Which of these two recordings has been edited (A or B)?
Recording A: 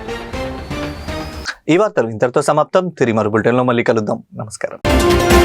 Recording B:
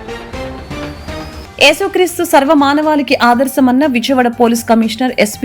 B